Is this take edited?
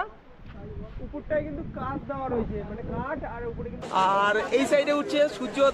yes; 1 cut; at 3.8 s

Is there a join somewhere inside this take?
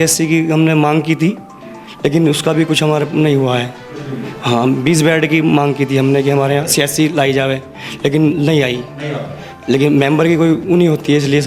no; 0 cuts

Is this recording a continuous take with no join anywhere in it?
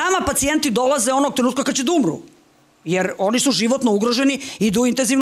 yes; 0 cuts

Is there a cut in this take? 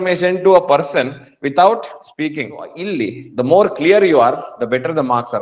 yes; 1 cut; at 2.8 s

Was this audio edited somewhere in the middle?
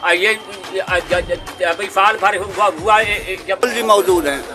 yes; 1 cut; at 3.6 s

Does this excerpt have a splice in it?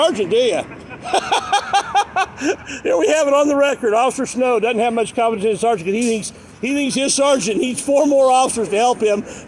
no; 0 cuts

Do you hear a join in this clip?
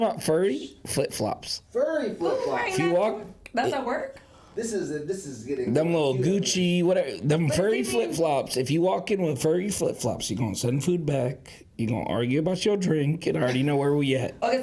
no; 0 cuts

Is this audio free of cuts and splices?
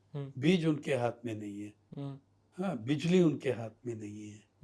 no; 1 cut; at 1.8 s

